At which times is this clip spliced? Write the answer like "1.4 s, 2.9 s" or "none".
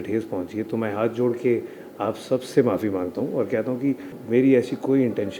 4.2 s